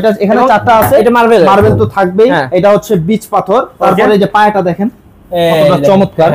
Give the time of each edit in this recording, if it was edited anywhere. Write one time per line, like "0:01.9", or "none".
none